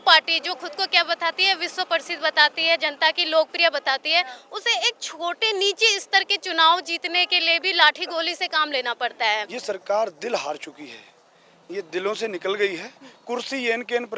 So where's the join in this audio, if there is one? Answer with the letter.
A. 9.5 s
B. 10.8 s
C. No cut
A